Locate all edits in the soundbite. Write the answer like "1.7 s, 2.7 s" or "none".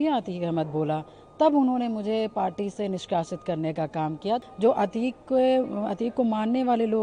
4.5 s